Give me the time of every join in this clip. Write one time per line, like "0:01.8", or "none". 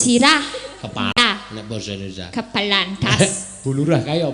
0:01.1